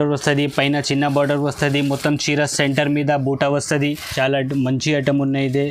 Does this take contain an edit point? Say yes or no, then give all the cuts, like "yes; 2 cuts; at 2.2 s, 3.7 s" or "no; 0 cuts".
yes; 1 cut; at 4.1 s